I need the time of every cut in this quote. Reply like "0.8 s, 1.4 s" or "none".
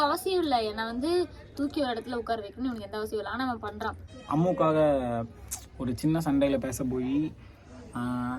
4.1 s